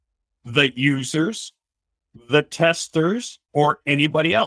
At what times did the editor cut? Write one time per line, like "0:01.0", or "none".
0:03.4